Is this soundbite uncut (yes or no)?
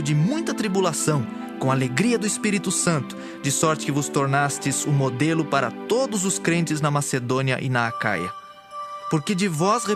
no